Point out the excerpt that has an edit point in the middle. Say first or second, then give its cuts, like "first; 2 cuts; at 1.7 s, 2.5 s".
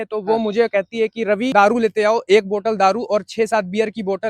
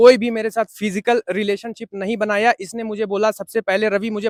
first; 1 cut; at 1.5 s